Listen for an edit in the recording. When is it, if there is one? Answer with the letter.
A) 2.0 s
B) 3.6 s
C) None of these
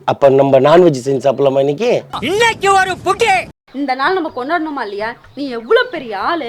B